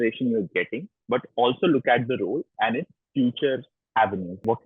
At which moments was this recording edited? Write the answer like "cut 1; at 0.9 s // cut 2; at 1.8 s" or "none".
cut 1; at 3.7 s